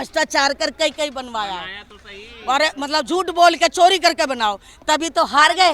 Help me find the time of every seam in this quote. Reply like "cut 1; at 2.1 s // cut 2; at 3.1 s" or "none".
none